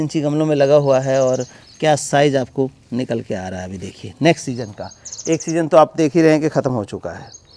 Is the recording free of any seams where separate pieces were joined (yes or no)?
yes